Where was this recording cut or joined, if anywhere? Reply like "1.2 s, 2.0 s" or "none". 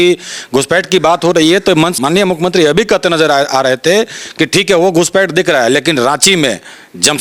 1.9 s

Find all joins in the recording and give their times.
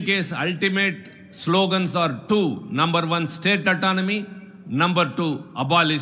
none

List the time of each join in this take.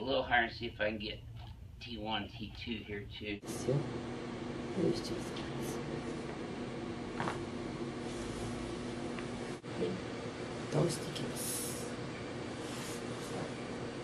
none

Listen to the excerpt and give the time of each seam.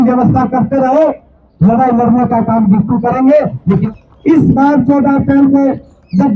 3.9 s

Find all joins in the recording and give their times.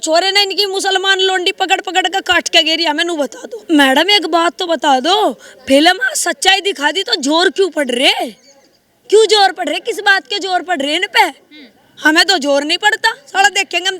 3.5 s

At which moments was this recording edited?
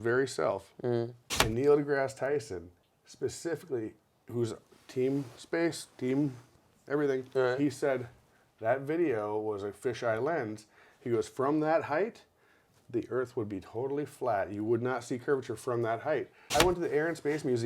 1.3 s, 16.5 s

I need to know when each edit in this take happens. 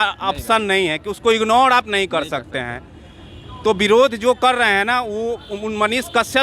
none

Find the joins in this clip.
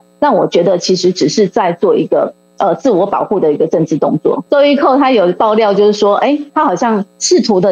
4.4 s

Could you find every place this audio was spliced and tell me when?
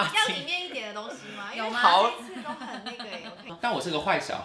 3.4 s

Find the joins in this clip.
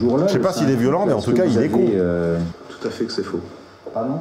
2.6 s

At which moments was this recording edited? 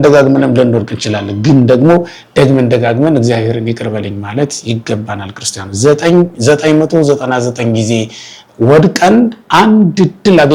none

